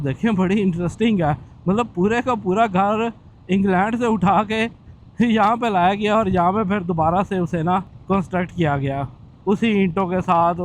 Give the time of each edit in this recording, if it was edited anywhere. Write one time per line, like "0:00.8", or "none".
0:07.9